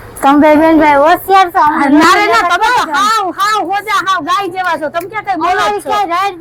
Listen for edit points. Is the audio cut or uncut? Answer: uncut